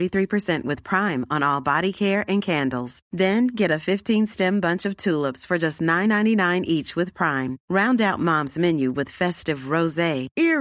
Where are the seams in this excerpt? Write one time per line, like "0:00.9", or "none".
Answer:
none